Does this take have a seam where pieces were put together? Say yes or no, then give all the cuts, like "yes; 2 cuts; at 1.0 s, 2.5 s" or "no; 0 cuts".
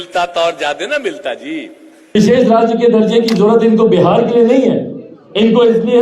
yes; 1 cut; at 2.2 s